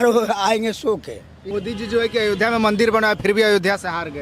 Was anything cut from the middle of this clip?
yes; 1 cut; at 1.3 s

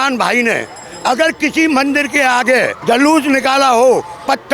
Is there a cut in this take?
yes; 1 cut; at 2.8 s

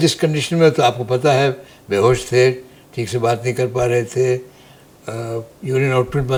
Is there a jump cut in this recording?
no; 0 cuts

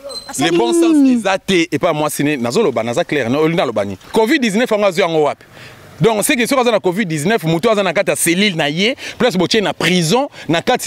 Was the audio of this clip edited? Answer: yes; 1 cut; at 4.0 s

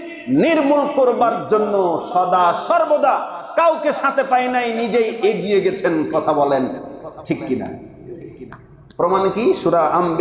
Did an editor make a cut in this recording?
no; 0 cuts

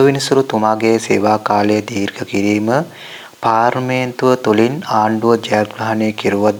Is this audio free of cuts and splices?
yes; 0 cuts

